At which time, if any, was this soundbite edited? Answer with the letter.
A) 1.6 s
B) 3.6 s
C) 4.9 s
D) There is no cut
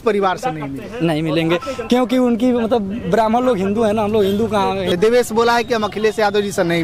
C